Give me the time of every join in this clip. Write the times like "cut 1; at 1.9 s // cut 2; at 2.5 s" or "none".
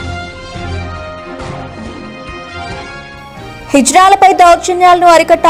cut 1; at 2.6 s

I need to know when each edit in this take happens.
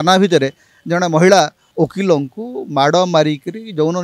cut 1; at 1.6 s

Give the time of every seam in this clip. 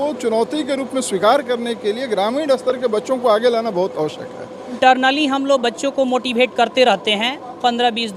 cut 1; at 4.7 s

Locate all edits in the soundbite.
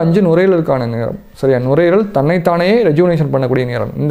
none

